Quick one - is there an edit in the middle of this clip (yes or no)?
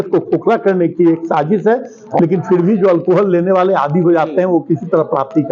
yes